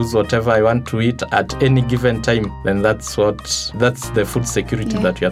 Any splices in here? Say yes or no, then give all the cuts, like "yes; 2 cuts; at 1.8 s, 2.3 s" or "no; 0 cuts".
yes; 1 cut; at 3.7 s